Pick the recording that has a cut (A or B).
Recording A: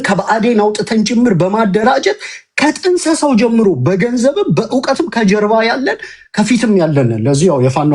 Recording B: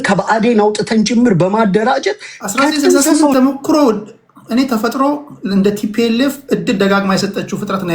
B